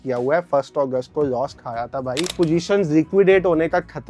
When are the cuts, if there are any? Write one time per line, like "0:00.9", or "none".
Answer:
0:02.3